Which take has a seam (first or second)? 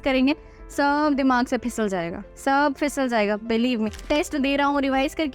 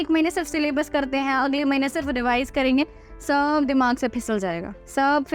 first